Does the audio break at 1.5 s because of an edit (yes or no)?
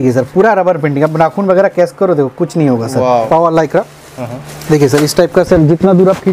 no